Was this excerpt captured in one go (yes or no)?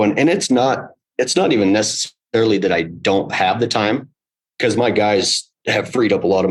yes